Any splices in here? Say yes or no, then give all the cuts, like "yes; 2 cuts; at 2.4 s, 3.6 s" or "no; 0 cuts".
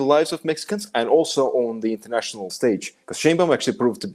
yes; 1 cut; at 2.5 s